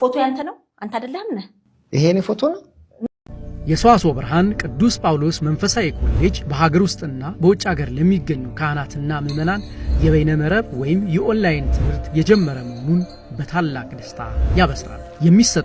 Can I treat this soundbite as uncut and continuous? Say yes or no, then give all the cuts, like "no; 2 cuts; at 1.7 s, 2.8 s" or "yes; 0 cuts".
no; 1 cut; at 3.0 s